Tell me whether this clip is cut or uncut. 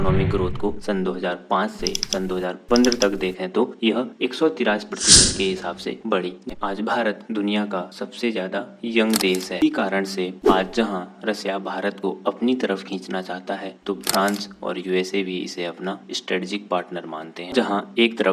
cut